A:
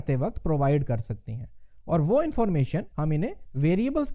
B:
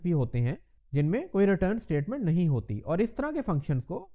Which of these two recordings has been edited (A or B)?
A